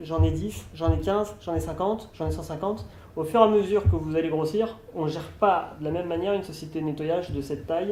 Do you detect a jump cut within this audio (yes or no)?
no